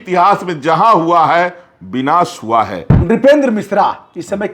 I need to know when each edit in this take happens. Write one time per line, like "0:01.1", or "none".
0:02.9